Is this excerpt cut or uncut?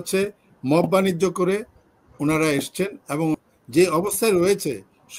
cut